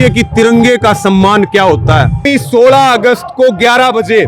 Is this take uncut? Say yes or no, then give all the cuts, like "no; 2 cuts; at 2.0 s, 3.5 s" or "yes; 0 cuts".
no; 1 cut; at 2.3 s